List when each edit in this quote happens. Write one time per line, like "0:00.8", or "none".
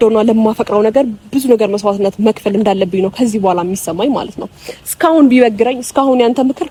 none